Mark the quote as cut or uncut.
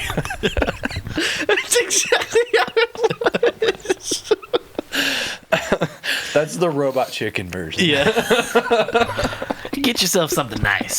cut